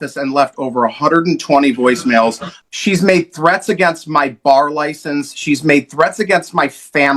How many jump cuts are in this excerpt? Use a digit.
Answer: 1